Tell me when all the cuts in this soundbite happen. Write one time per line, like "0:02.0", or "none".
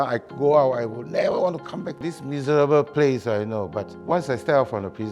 0:02.1
0:03.9